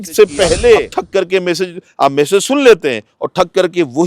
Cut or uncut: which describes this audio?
cut